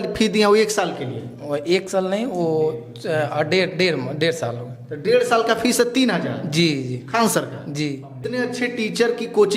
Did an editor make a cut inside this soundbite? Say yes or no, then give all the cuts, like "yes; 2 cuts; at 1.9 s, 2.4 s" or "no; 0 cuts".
yes; 1 cut; at 8.3 s